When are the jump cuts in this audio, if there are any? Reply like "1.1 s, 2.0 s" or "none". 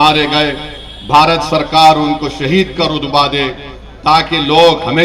none